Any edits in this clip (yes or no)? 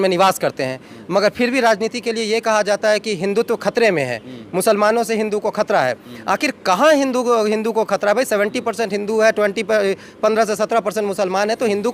no